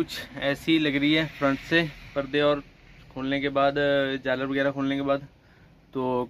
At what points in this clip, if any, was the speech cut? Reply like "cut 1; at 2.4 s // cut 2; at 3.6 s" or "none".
none